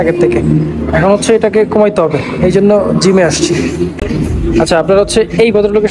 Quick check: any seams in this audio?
no; 0 cuts

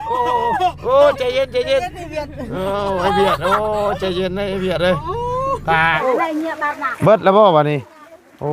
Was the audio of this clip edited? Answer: yes; 1 cut; at 6.0 s

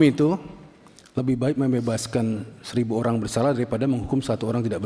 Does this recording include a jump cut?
no; 0 cuts

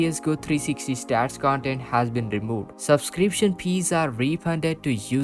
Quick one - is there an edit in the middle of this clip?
no; 0 cuts

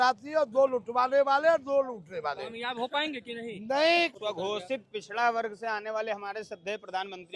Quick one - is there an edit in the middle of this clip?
yes; 1 cut; at 4.1 s

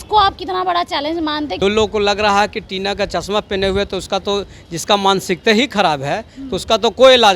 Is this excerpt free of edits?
no; 1 cut; at 1.6 s

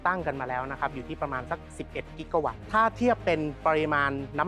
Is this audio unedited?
no; 2 cuts; at 2.6 s, 3.6 s

